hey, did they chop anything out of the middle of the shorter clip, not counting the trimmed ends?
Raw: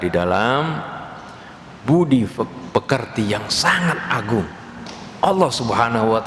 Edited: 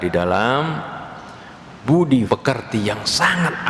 yes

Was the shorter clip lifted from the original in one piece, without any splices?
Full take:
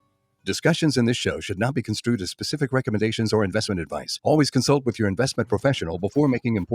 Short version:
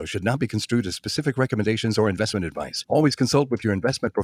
yes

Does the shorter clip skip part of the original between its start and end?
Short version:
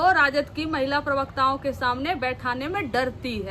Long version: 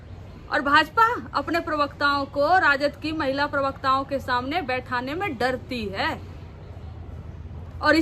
no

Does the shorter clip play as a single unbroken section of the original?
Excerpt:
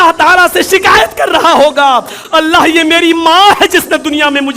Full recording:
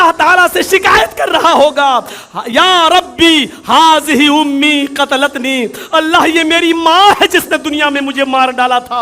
no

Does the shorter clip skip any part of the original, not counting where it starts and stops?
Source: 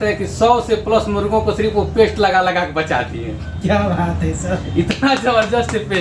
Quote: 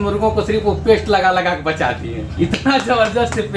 yes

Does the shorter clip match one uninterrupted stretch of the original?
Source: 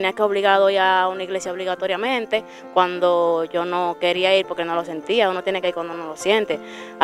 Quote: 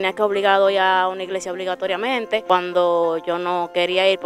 no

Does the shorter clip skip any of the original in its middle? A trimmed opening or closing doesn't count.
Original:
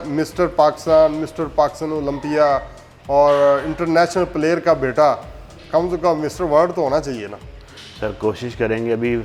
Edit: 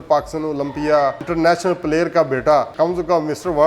yes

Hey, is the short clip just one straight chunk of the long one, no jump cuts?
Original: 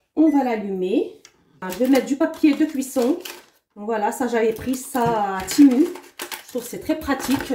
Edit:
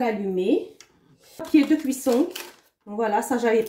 no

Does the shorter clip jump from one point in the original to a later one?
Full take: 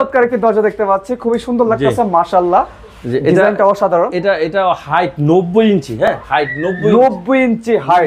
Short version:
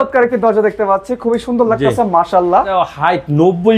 yes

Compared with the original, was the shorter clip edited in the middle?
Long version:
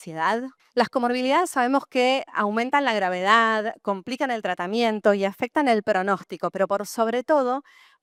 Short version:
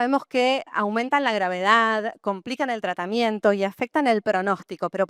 no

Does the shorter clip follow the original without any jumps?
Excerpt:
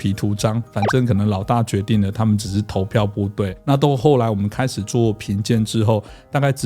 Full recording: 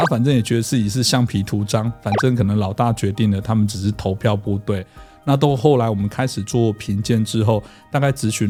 no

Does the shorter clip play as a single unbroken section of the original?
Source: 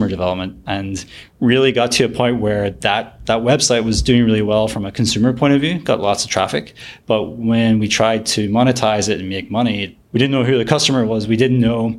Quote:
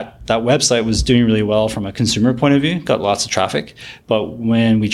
yes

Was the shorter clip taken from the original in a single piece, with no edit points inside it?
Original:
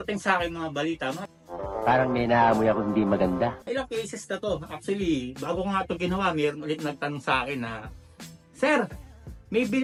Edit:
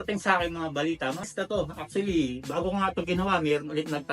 no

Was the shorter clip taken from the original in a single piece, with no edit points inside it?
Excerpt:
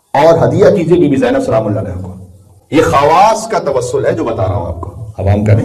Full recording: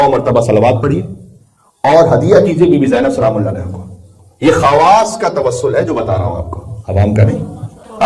yes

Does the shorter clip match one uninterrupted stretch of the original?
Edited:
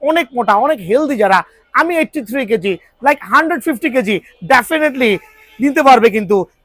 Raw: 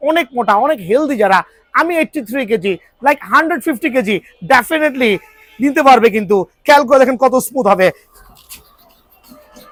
yes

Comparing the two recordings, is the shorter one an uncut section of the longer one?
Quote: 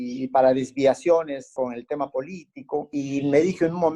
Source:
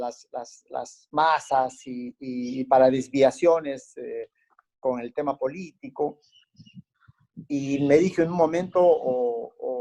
no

